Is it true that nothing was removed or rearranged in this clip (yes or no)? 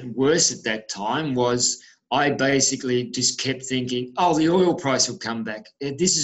yes